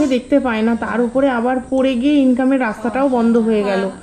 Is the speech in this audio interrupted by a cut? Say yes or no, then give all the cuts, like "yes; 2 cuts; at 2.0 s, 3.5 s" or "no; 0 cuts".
no; 0 cuts